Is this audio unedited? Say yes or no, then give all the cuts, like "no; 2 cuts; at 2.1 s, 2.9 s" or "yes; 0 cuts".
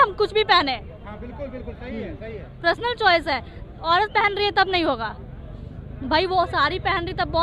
yes; 0 cuts